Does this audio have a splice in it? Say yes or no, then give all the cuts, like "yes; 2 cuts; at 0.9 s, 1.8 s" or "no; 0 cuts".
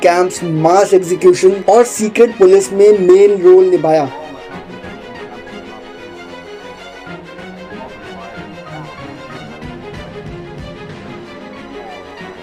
no; 0 cuts